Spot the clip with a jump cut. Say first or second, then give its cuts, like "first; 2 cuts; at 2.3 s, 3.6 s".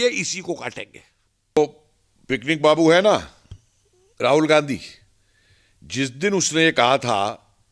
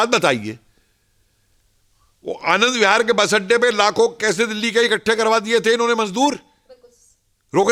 first; 1 cut; at 1.6 s